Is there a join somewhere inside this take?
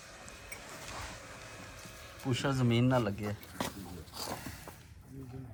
no; 0 cuts

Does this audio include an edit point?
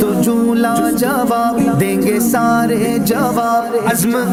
no; 0 cuts

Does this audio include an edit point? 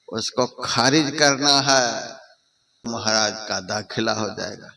yes; 1 cut; at 2.9 s

